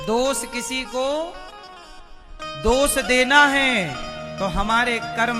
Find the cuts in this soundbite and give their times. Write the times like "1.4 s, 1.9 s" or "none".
none